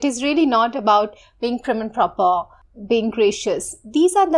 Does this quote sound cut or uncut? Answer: cut